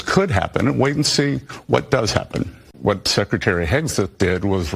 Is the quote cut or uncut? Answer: cut